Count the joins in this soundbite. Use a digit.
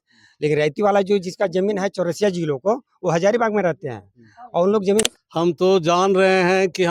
1